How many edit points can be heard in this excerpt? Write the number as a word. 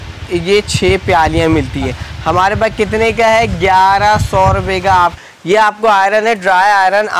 two